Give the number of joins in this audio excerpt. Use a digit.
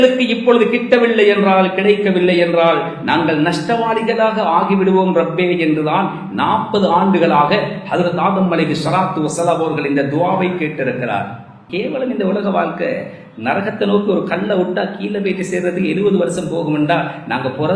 1